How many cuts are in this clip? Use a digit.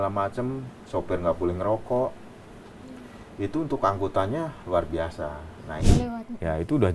1